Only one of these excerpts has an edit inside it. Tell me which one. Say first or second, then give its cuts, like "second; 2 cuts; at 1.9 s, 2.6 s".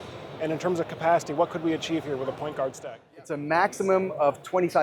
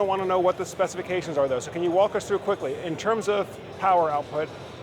first; 1 cut; at 3.0 s